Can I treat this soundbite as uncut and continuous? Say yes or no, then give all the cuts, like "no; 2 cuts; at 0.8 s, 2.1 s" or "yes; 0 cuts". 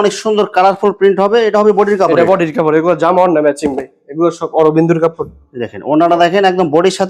yes; 0 cuts